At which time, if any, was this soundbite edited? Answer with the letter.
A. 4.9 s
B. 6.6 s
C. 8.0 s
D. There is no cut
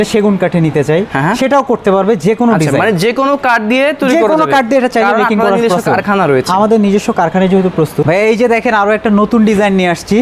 C